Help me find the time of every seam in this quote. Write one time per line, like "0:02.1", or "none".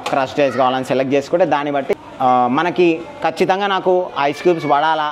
0:01.9